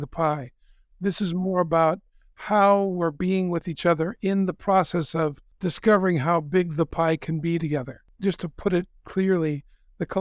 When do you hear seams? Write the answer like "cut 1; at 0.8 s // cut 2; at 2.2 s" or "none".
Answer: cut 1; at 5.5 s // cut 2; at 7.8 s